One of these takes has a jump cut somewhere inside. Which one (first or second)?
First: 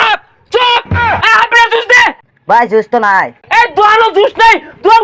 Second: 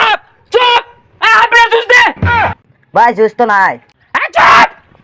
first